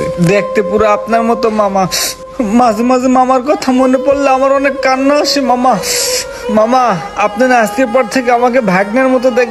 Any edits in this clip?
no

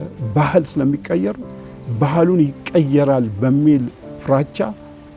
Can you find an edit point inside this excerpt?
no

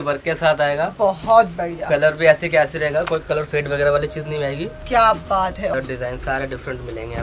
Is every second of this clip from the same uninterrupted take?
no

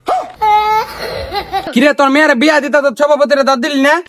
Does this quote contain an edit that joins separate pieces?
yes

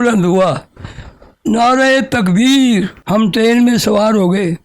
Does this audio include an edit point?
yes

